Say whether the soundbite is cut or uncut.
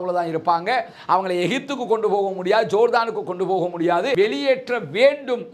cut